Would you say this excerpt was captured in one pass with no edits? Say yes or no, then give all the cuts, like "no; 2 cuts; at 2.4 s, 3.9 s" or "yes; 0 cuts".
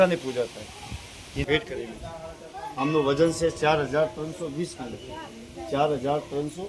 no; 1 cut; at 1.4 s